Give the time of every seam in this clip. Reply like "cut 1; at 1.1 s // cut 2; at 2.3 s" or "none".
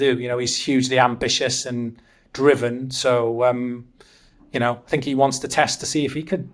none